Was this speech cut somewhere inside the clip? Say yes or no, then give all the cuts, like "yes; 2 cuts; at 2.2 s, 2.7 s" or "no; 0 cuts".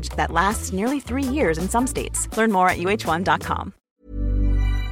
yes; 1 cut; at 3.8 s